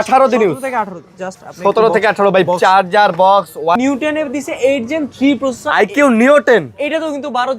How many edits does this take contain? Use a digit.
1